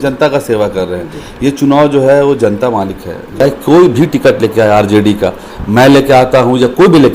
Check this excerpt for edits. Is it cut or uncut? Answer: cut